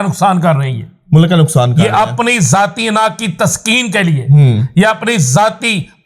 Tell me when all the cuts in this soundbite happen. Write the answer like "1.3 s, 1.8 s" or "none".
none